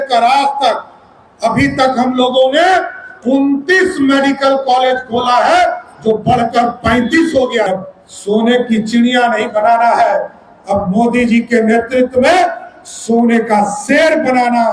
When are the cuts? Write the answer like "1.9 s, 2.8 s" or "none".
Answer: 7.7 s